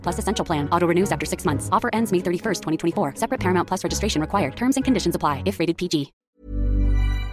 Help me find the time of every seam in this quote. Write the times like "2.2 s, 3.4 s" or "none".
6.2 s